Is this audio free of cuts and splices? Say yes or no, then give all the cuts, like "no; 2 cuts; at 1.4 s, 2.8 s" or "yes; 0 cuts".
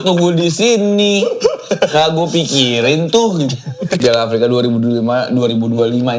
no; 1 cut; at 4.0 s